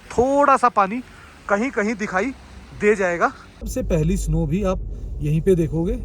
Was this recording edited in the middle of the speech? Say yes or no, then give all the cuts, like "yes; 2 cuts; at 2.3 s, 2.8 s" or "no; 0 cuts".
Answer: yes; 1 cut; at 3.7 s